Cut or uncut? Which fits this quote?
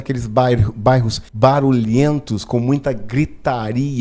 cut